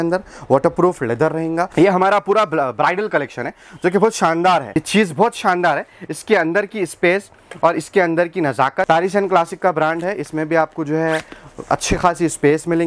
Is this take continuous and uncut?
no; 3 cuts; at 1.7 s, 4.7 s, 8.9 s

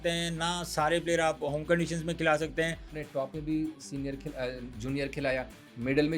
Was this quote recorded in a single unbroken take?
no; 1 cut; at 2.9 s

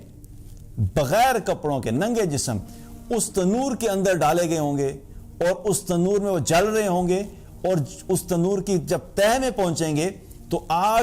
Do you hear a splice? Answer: no; 0 cuts

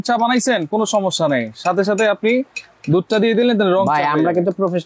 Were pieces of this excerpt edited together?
no; 0 cuts

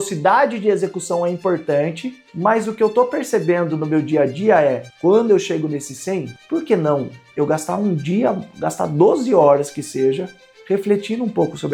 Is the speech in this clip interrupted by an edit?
no; 0 cuts

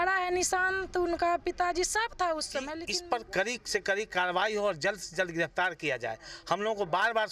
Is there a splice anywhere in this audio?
yes; 1 cut; at 2.8 s

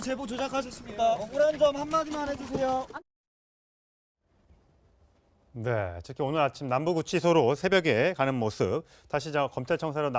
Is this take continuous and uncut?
yes; 0 cuts

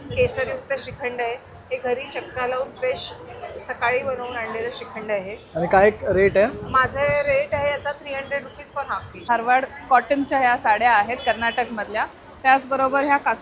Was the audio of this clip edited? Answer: yes; 1 cut; at 9.2 s

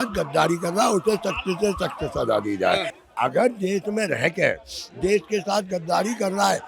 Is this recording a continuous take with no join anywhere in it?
yes; 0 cuts

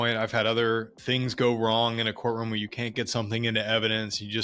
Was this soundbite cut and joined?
yes; 1 cut; at 1.0 s

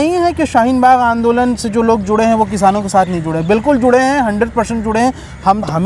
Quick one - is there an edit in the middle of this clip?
no; 0 cuts

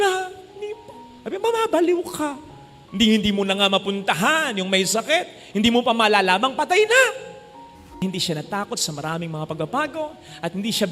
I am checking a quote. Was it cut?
yes; 1 cut; at 7.9 s

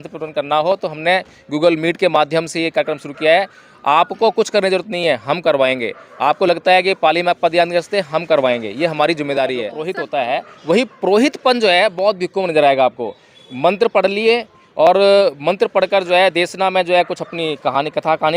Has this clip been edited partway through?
yes; 1 cut; at 9.6 s

